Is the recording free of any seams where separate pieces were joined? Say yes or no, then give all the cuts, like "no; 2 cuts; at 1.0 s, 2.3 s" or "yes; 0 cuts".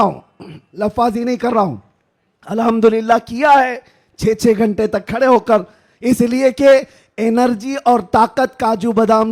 yes; 0 cuts